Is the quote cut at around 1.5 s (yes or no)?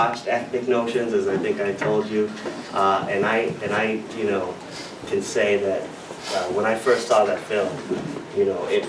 yes